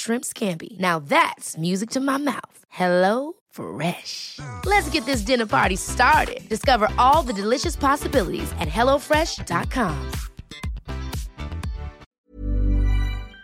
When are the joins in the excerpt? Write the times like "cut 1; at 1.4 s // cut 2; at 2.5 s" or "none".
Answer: cut 1; at 12.0 s